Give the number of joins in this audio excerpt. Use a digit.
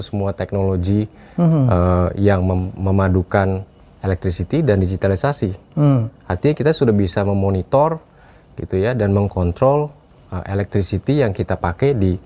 0